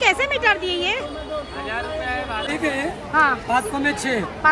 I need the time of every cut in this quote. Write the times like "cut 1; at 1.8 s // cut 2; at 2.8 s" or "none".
cut 1; at 2.5 s